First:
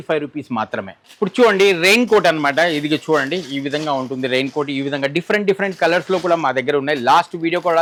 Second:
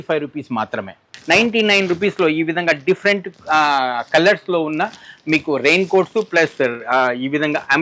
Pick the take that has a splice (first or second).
second